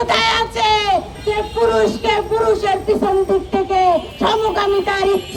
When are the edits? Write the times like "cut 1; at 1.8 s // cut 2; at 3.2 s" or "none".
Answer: cut 1; at 1.1 s // cut 2; at 4.1 s